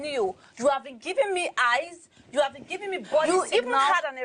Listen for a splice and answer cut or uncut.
uncut